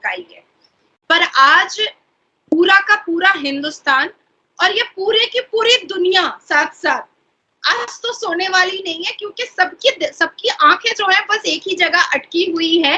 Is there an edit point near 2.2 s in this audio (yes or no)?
no